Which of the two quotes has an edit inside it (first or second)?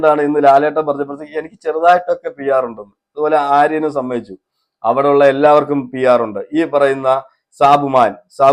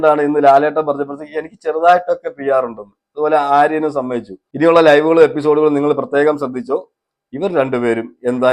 second